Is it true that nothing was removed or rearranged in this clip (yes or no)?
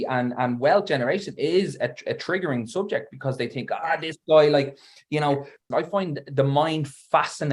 no